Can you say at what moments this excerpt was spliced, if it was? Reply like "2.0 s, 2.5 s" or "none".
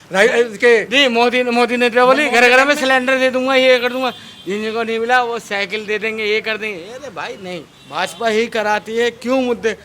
7.8 s